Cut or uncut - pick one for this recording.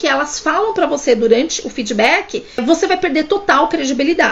uncut